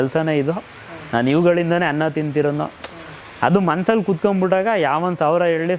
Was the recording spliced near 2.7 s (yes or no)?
no